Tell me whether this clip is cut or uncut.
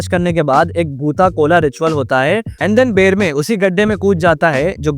cut